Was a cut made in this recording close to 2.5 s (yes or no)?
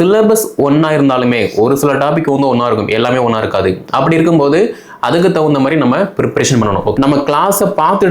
no